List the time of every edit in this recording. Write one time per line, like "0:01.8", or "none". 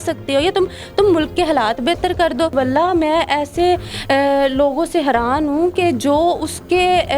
0:02.5